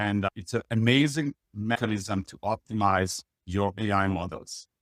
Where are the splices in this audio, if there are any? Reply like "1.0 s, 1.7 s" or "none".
1.8 s